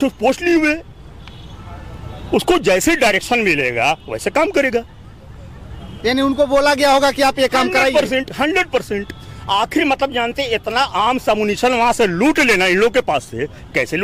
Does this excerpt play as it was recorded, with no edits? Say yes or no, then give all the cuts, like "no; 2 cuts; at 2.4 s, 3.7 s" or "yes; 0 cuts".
yes; 0 cuts